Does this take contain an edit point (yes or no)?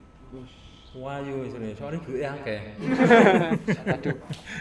no